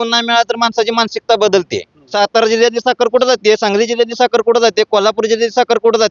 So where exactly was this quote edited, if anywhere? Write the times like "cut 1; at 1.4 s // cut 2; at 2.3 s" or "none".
cut 1; at 2.0 s